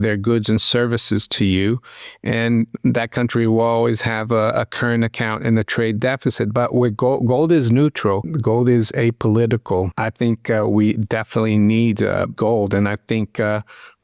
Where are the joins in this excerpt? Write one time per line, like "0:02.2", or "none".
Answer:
0:08.3
0:09.9
0:12.3